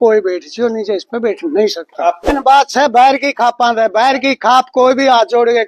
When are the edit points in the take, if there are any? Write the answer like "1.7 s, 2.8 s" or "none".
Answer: 2.3 s